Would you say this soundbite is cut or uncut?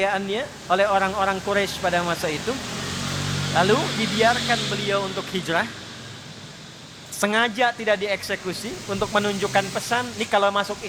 uncut